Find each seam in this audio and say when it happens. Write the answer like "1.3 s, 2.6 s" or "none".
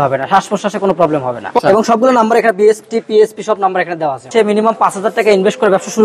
1.6 s, 4.3 s